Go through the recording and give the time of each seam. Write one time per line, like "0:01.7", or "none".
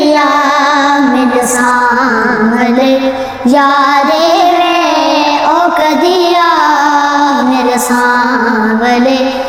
none